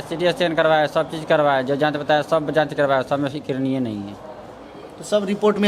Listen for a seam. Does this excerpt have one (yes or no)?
no